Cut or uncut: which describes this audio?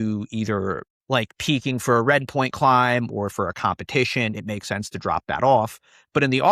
cut